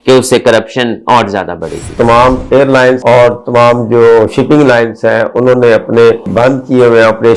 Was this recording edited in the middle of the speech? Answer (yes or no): yes